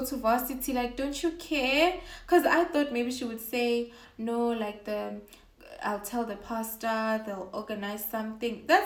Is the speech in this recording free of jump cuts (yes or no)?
yes